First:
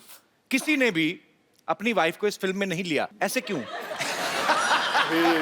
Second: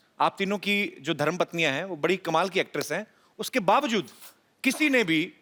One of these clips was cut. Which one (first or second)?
first